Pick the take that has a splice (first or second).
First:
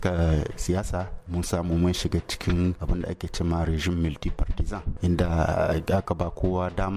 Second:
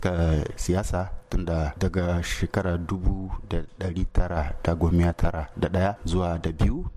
first